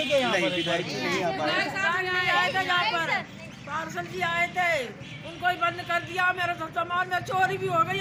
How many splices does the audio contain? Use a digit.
0